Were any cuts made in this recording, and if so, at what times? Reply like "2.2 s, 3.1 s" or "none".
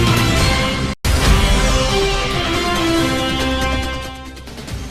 1.0 s